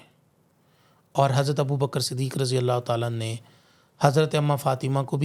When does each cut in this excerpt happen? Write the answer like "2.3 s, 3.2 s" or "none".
none